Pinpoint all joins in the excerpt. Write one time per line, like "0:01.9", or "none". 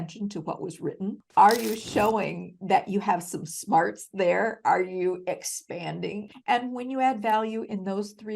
0:06.2